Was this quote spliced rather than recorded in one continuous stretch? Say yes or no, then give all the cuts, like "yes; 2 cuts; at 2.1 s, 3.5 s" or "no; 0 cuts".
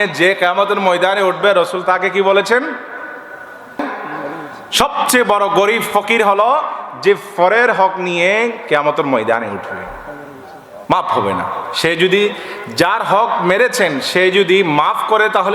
yes; 1 cut; at 3.8 s